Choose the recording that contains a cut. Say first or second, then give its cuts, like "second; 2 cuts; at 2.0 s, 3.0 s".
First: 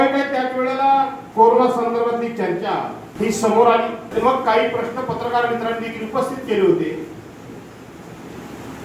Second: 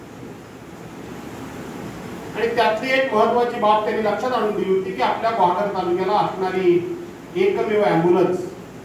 first; 3 cuts; at 1.2 s, 3.0 s, 4.0 s